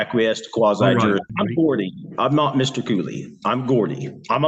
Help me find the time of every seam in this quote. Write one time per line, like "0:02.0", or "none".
0:01.3